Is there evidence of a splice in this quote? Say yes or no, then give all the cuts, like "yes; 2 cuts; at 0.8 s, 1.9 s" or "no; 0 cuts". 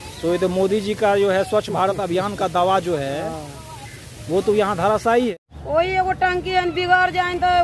yes; 1 cut; at 5.4 s